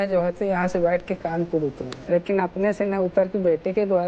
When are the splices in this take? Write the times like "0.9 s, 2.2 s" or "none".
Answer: 1.9 s